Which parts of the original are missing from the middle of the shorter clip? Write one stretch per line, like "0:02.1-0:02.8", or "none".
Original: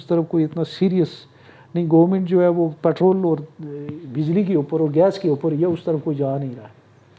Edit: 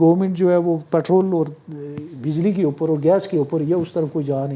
none